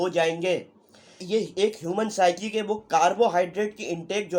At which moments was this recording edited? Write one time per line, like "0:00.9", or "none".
0:01.2